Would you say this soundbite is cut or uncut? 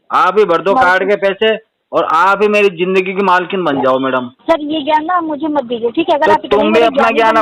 cut